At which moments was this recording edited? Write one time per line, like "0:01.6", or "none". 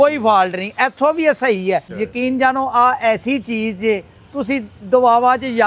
0:01.9